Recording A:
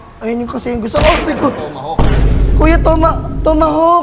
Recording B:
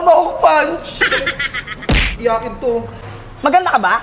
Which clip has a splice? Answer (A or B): B